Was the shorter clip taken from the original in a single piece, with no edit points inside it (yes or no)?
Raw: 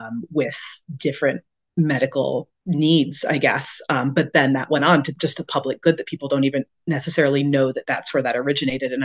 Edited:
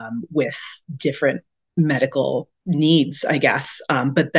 yes